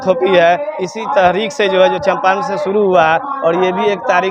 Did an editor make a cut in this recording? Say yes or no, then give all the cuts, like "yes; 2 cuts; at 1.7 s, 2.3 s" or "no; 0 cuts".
no; 0 cuts